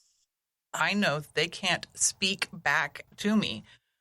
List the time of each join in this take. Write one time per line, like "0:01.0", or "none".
0:03.0